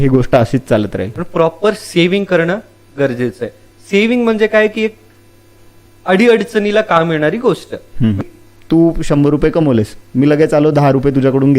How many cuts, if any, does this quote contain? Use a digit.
2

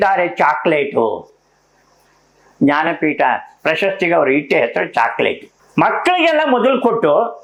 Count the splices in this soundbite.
0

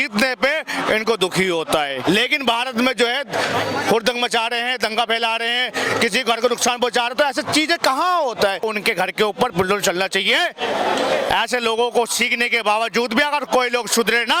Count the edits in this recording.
2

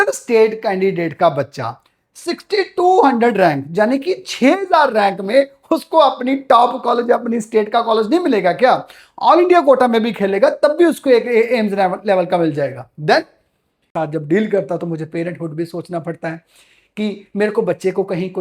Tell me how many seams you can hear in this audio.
1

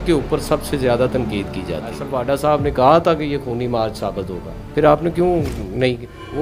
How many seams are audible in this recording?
1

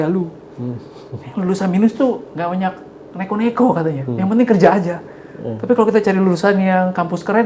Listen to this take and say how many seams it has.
0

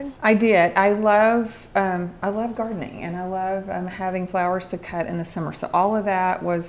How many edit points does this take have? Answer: 0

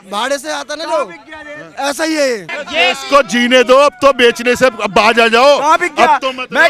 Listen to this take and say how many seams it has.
1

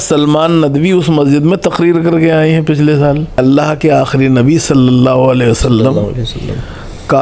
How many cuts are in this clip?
1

